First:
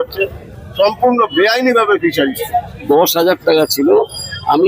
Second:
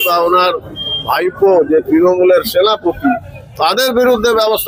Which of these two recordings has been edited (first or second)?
first